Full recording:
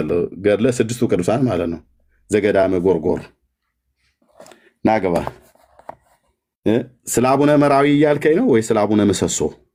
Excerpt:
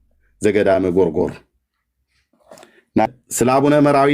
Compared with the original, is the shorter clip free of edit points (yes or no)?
no